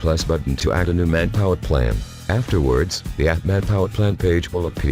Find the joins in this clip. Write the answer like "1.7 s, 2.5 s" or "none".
1.6 s, 4.1 s